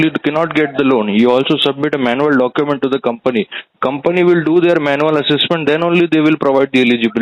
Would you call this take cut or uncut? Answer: uncut